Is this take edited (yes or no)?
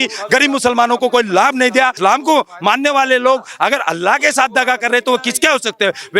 yes